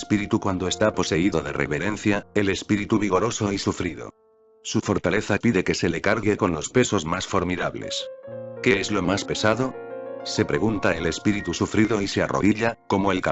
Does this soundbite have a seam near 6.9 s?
yes; 1 cut; at 6.9 s

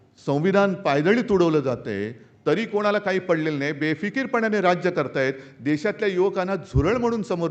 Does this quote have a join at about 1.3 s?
no; 0 cuts

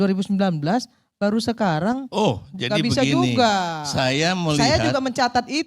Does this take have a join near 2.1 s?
yes; 1 cut; at 2.1 s

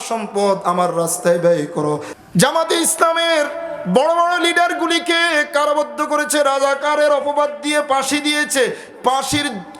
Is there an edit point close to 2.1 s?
yes; 1 cut; at 2.1 s

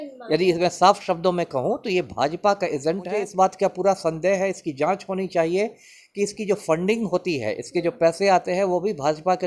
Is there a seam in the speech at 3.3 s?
yes; 1 cut; at 3.3 s

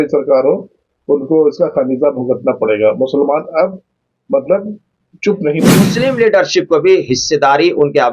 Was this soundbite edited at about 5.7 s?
yes; 1 cut; at 5.7 s

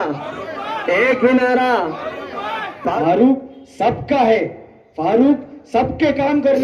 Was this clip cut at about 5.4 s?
no; 1 cut; at 2.9 s

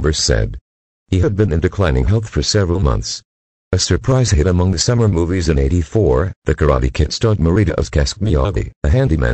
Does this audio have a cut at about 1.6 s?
no; 1 cut; at 4.6 s

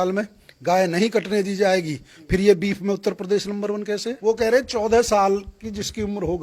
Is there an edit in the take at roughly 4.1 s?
yes; 1 cut; at 4.1 s

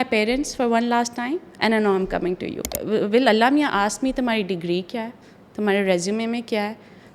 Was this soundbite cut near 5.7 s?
no; 1 cut; at 2.8 s

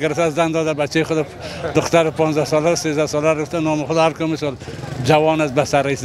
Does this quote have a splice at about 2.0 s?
no; 0 cuts

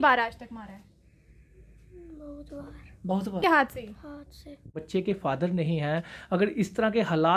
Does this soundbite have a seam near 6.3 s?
no; 2 cuts; at 3.4 s, 4.8 s

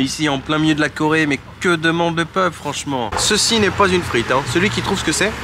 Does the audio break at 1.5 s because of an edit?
no; 1 cut; at 3.1 s

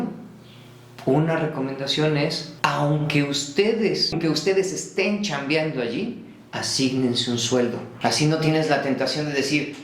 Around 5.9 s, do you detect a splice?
no; 3 cuts; at 2.5 s, 4.2 s, 7.9 s

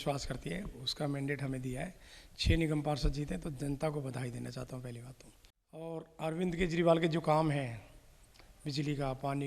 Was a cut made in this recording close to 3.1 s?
no; 1 cut; at 5.8 s

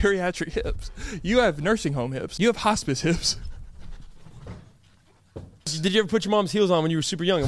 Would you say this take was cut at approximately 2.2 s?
yes; 2 cuts; at 2.2 s, 5.8 s

